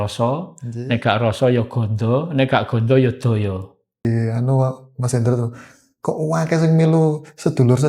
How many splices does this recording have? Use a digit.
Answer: 1